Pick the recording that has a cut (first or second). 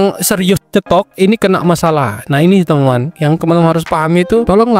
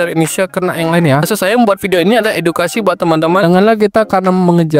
second